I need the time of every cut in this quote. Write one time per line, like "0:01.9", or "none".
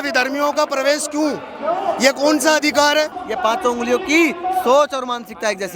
0:03.2